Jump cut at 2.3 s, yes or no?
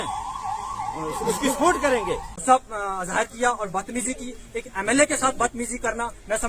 yes